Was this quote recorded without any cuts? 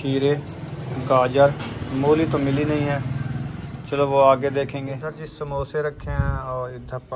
no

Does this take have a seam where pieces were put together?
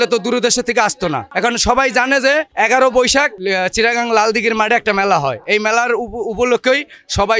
no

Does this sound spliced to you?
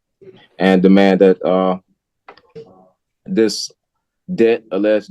no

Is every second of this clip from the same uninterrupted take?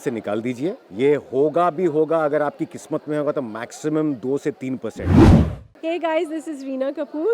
no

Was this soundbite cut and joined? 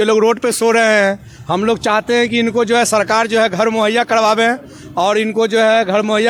no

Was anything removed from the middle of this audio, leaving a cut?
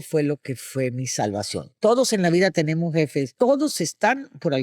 yes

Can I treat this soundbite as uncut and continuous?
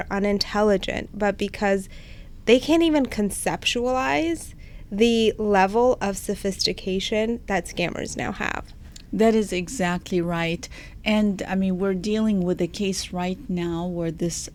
yes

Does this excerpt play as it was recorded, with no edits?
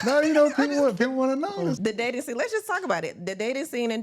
no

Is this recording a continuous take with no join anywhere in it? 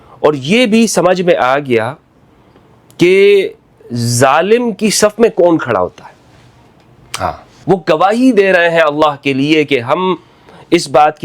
no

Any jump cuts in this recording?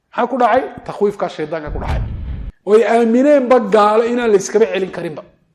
yes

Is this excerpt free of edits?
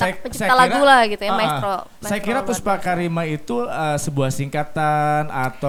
yes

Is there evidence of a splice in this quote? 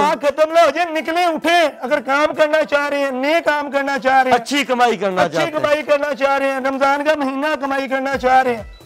no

